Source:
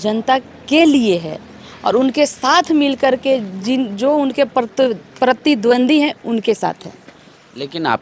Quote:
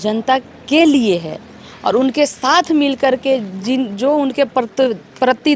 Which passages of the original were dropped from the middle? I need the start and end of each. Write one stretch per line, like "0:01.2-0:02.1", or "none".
none